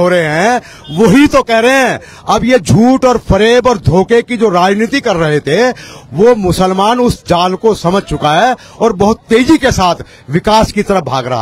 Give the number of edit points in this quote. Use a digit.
0